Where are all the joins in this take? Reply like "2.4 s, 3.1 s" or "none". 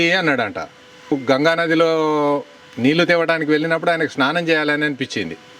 1.1 s